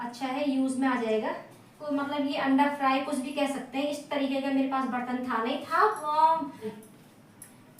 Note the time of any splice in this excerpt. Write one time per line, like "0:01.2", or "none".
0:01.7
0:06.8

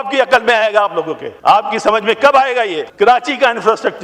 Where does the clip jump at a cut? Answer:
0:01.2
0:02.9

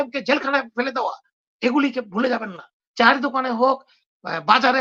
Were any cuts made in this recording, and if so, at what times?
0:02.8

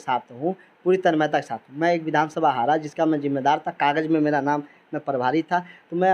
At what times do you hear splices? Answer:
none

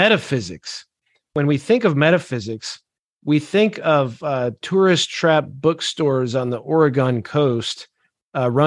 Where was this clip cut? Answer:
0:01.2

